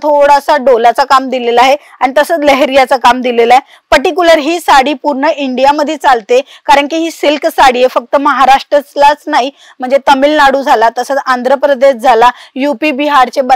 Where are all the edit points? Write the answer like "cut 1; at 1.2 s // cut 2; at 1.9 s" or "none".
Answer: none